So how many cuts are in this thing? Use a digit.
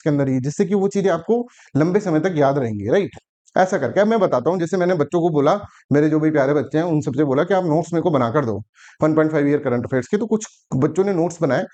0